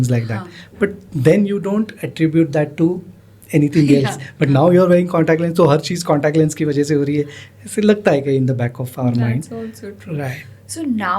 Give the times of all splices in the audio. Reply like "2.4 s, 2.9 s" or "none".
none

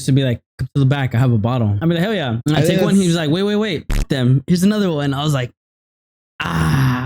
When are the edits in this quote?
2.2 s, 4.0 s

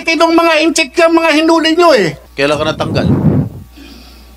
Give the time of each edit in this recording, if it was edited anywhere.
2.2 s

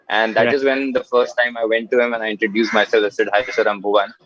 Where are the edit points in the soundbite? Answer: none

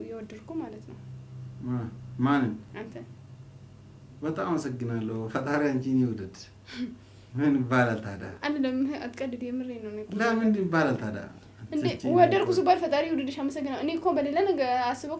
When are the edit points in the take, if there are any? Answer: none

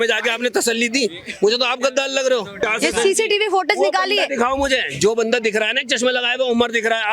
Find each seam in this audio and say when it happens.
2.6 s

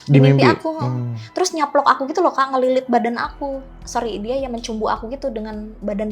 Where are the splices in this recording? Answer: 3.8 s

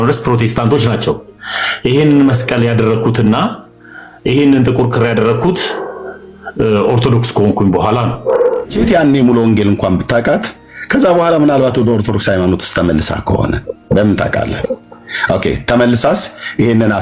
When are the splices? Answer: 8.7 s

